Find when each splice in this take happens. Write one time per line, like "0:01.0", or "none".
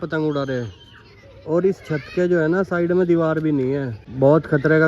0:04.0